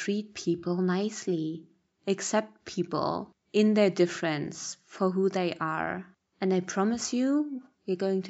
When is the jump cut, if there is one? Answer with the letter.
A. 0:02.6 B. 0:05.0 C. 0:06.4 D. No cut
D